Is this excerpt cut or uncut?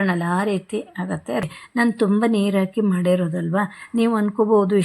cut